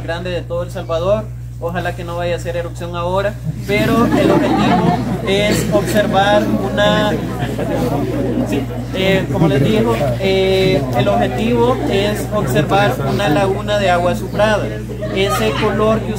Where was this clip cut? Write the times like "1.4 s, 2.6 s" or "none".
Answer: none